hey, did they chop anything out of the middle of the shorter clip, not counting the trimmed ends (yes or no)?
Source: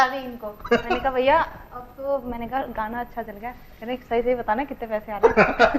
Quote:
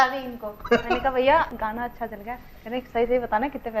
yes